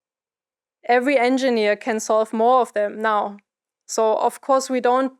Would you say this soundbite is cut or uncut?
uncut